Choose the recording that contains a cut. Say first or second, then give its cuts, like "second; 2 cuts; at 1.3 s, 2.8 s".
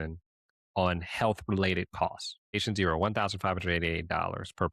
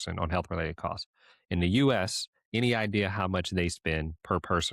first; 1 cut; at 2.5 s